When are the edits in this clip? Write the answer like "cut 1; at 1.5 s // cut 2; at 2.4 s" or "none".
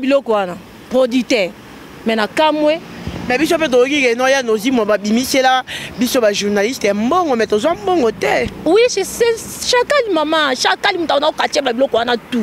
none